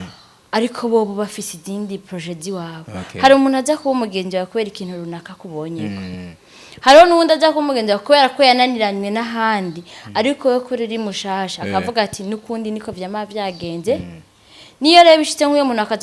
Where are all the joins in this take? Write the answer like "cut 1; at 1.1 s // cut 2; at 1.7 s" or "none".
none